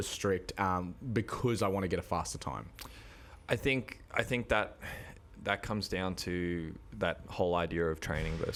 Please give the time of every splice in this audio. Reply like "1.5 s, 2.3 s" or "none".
none